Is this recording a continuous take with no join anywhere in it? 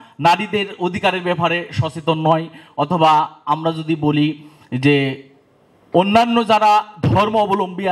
yes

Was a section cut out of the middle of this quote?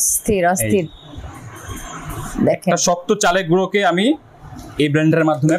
no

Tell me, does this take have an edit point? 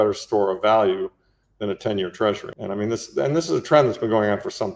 yes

